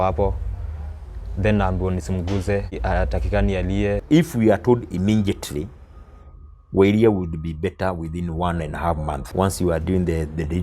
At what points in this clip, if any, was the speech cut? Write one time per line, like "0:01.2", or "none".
0:02.7
0:04.0
0:09.2